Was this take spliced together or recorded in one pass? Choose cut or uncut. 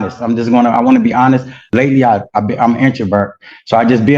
cut